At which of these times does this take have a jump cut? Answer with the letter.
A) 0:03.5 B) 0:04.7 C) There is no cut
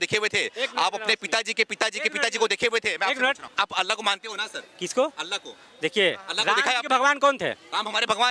A